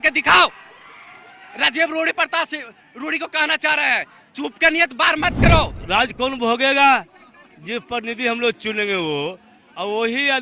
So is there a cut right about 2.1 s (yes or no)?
no